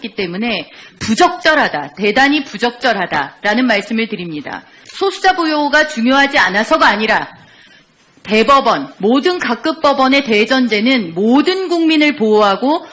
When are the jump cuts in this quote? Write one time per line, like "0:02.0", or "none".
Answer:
none